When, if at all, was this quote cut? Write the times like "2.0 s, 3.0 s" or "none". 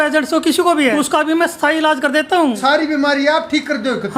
0.9 s, 2.5 s